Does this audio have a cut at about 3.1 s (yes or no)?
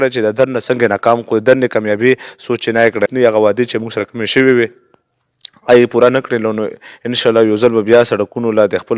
yes